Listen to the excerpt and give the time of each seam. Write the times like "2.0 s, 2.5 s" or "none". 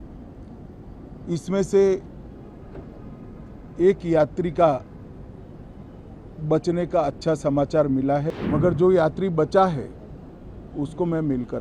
8.3 s